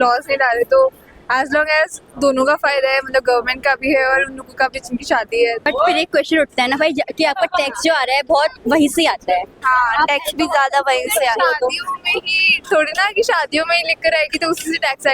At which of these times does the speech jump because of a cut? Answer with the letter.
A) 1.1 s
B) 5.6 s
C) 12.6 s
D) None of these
B